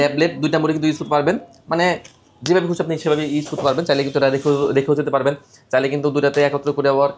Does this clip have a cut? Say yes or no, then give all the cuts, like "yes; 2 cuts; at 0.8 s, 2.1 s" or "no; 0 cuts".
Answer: no; 0 cuts